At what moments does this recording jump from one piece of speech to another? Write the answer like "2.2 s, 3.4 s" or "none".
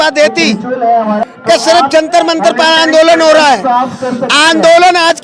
1.2 s